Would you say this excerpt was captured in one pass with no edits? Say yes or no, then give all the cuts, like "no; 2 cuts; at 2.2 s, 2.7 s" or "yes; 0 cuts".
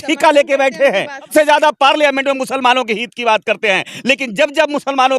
no; 1 cut; at 1.3 s